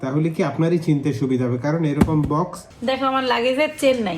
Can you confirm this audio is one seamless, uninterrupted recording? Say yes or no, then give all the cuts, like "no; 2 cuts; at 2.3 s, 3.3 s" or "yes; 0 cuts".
no; 1 cut; at 2.7 s